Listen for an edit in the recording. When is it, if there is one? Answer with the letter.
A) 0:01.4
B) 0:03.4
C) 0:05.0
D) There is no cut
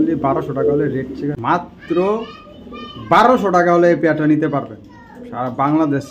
A